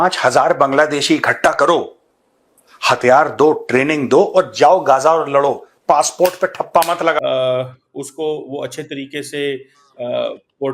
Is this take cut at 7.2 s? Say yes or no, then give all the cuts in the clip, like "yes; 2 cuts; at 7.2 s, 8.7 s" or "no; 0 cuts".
yes; 1 cut; at 7.2 s